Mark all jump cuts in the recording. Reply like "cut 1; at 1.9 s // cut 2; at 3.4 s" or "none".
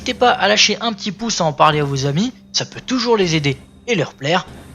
cut 1; at 1.3 s